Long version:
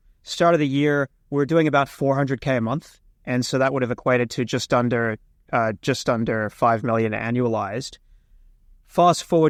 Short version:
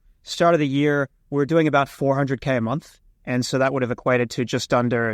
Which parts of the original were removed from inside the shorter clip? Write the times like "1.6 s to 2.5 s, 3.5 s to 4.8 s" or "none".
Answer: none